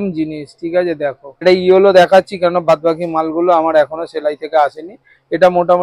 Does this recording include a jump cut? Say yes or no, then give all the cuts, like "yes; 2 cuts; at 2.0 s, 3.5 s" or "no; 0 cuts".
yes; 1 cut; at 1.4 s